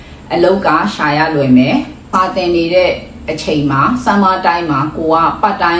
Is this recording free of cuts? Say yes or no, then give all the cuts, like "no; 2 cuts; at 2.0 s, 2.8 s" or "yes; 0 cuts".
no; 1 cut; at 2.1 s